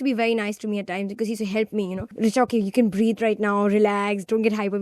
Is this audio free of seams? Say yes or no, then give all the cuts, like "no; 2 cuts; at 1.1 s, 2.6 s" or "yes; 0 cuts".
no; 1 cut; at 2.1 s